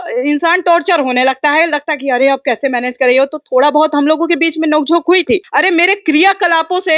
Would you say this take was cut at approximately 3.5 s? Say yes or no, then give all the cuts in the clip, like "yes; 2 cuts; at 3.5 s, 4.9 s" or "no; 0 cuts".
no; 1 cut; at 5.5 s